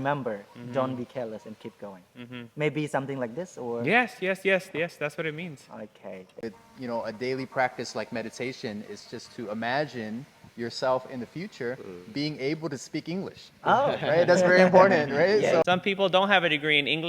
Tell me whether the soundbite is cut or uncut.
cut